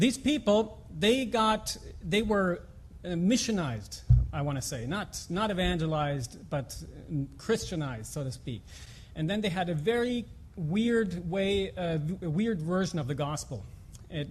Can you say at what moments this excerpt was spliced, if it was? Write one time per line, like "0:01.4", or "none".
0:09.8